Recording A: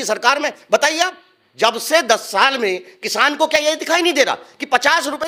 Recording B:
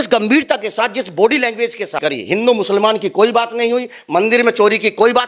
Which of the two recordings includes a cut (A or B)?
B